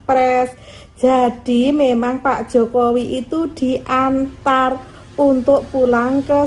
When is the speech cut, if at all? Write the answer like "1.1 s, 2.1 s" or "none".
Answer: none